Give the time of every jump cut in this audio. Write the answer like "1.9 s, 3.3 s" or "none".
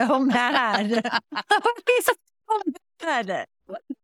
none